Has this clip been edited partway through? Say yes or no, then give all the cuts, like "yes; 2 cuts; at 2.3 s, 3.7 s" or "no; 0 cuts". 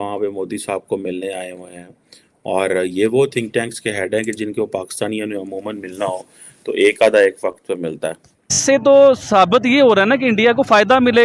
yes; 1 cut; at 8.6 s